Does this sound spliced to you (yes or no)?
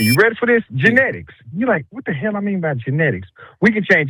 no